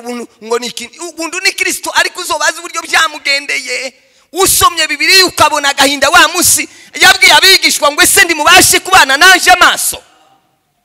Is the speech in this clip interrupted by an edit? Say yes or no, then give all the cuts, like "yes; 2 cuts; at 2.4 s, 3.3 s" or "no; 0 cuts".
no; 0 cuts